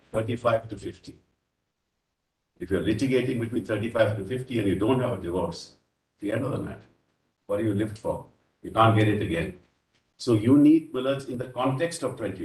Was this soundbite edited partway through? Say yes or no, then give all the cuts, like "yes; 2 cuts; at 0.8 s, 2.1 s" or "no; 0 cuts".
no; 0 cuts